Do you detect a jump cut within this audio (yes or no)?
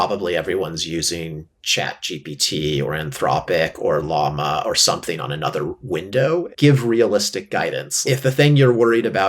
yes